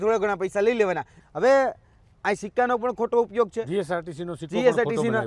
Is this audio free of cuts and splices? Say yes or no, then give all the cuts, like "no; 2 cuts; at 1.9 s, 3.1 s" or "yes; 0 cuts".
no; 1 cut; at 1.2 s